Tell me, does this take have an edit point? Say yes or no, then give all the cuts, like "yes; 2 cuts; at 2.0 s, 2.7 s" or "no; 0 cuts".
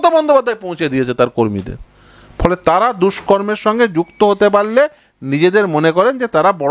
no; 0 cuts